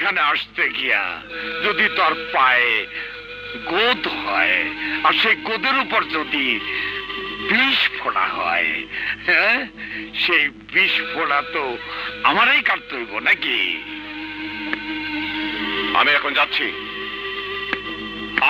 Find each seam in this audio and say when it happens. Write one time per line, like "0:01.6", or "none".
none